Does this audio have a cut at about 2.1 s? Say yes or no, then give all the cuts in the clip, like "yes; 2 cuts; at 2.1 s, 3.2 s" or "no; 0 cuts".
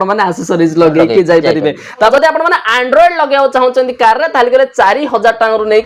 yes; 1 cut; at 2.1 s